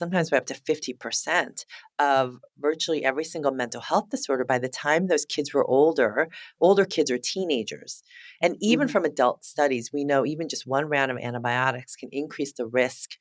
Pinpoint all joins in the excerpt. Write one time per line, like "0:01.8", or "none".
none